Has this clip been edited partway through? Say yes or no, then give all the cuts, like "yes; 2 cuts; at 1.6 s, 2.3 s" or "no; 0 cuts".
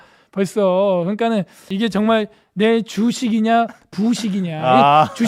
yes; 1 cut; at 1.7 s